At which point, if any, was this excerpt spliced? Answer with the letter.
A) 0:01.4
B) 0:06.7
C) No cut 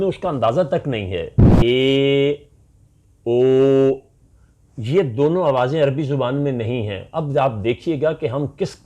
A